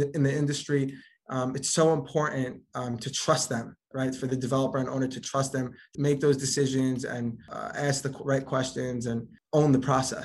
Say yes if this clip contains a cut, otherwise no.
yes